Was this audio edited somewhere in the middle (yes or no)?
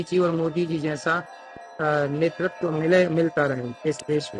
no